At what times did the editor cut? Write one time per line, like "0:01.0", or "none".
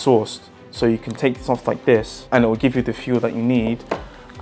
0:02.2

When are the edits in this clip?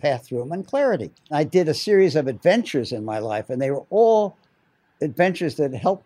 0:01.3

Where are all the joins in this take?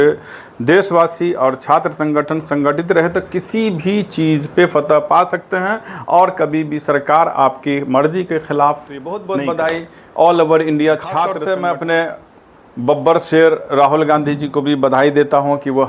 0:09.2
0:11.4

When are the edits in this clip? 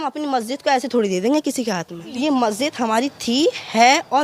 0:02.1

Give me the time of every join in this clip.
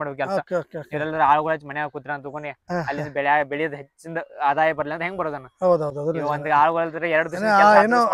none

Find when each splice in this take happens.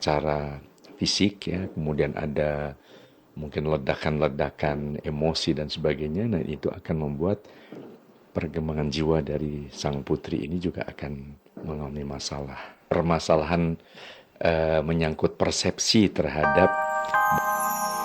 0:16.7

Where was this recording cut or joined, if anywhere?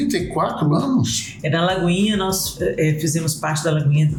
none

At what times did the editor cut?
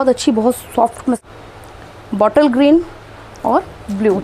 0:01.2

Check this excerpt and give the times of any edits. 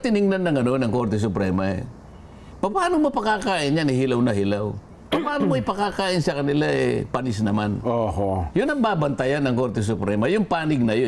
none

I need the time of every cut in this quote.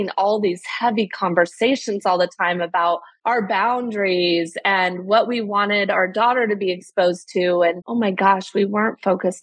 0:03.1
0:07.8

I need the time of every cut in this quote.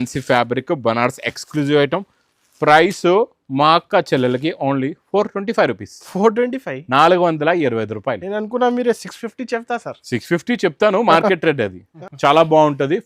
0:12.0

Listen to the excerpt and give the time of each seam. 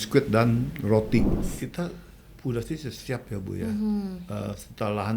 0:01.3

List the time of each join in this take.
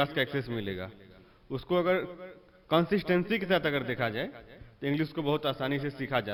none

